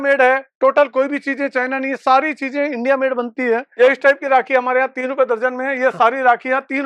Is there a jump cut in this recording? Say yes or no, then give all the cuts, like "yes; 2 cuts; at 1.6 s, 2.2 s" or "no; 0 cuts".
yes; 1 cut; at 3.8 s